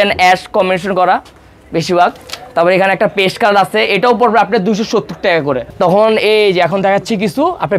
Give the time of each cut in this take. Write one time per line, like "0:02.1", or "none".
0:05.6